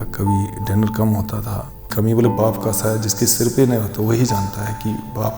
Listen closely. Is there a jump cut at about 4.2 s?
no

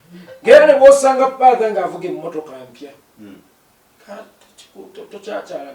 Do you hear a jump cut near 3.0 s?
no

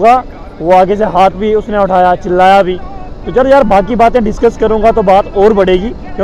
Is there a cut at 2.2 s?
no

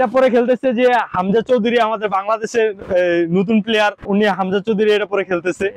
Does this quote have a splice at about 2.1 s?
no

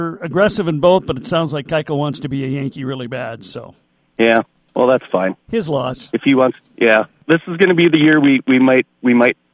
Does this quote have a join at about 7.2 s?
yes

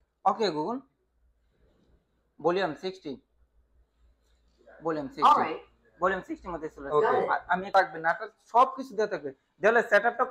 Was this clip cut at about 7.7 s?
yes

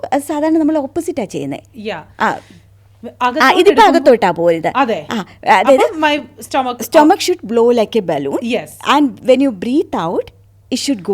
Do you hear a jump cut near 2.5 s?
no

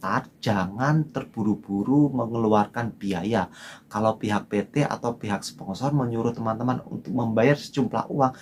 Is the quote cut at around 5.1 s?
no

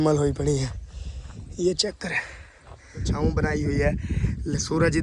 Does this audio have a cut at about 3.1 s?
yes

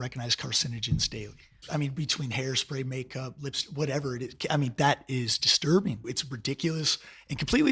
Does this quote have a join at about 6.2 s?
yes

